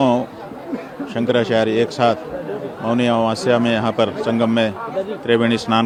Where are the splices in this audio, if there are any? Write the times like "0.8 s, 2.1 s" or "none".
none

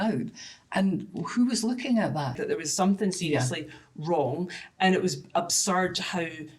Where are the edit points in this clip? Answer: 2.4 s

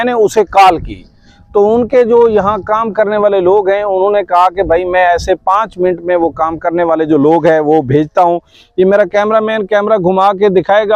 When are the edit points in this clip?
none

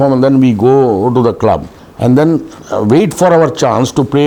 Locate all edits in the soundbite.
none

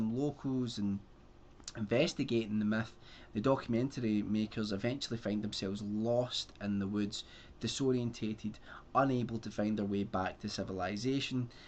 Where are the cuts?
4.7 s

